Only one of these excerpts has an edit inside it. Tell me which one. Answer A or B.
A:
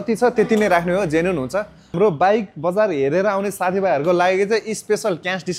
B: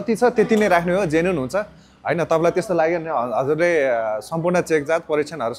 A